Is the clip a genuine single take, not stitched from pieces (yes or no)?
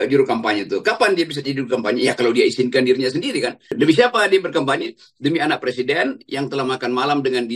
no